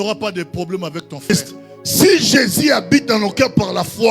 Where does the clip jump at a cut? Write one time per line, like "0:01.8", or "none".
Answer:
0:01.3

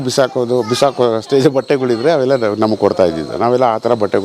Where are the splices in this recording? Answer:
none

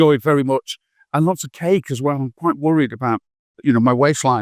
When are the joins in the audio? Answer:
none

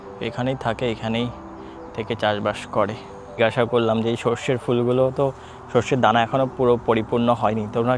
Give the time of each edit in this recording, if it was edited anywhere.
0:03.2

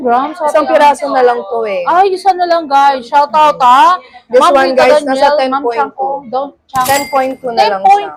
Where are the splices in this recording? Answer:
none

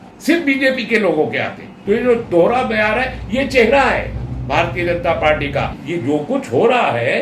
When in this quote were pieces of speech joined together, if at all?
0:01.7
0:05.8

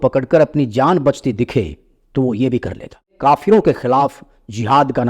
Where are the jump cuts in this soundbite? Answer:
0:03.1

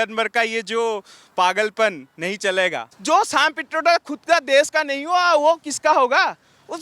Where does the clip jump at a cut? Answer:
0:02.9

